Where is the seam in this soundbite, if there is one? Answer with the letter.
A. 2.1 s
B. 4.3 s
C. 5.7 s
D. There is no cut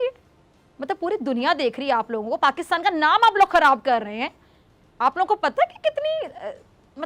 D